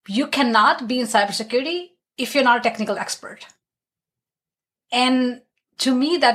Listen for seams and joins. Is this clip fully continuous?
yes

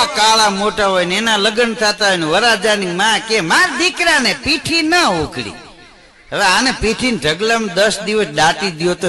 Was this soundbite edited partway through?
no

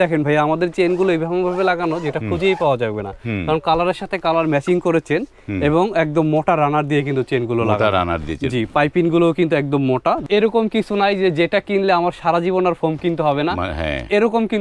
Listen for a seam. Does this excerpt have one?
yes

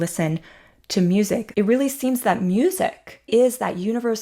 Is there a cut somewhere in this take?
yes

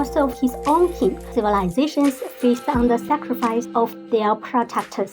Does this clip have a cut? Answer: yes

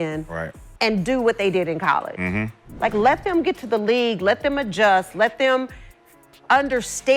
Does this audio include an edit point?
no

